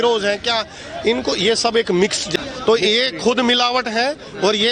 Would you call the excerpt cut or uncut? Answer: cut